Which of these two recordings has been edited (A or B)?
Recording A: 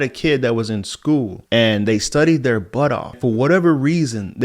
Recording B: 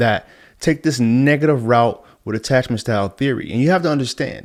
A